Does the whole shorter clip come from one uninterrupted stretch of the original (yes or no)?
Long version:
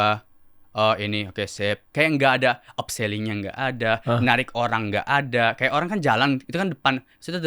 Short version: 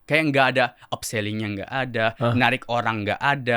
yes